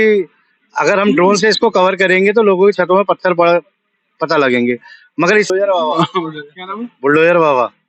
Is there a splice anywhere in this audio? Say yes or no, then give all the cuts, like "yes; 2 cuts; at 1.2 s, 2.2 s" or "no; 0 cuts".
yes; 1 cut; at 5.5 s